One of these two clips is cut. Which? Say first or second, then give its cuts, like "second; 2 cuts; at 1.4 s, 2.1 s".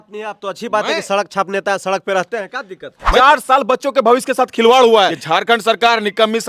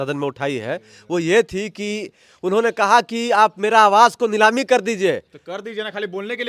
first; 2 cuts; at 3.0 s, 5.2 s